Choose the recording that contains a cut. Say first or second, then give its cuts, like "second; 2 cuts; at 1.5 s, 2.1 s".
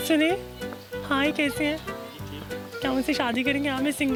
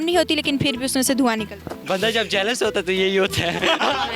second; 1 cut; at 1.7 s